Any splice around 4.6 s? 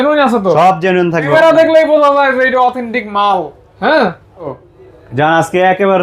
yes; 2 cuts; at 1.3 s, 4.6 s

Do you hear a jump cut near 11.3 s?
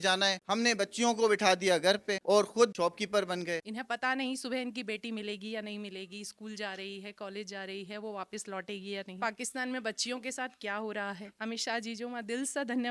yes; 3 cuts; at 3.7 s, 9.1 s, 11.3 s

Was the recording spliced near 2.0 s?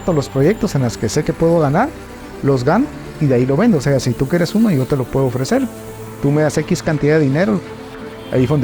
no; 1 cut; at 7.7 s

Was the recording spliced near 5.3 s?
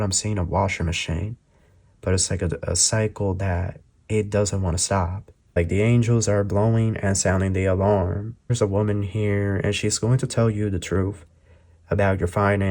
yes; 2 cuts; at 5.3 s, 8.5 s

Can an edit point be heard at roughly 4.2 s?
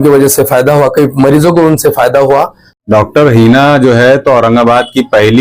no; 1 cut; at 2.7 s

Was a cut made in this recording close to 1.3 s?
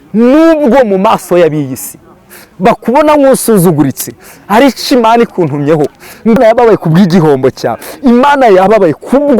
no; 1 cut; at 6.4 s

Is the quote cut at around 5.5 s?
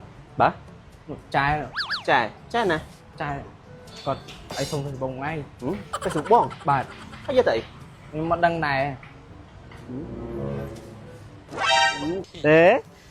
no; 1 cut; at 12.1 s

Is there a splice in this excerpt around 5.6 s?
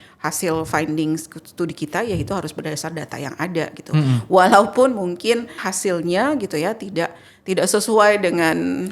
yes; 1 cut; at 5.6 s

